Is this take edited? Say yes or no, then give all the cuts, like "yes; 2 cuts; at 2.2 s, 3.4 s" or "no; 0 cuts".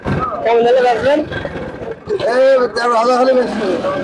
no; 0 cuts